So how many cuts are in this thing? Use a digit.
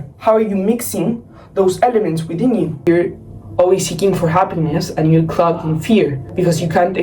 1